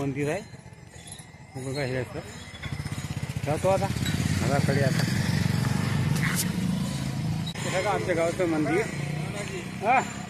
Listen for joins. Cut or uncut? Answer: cut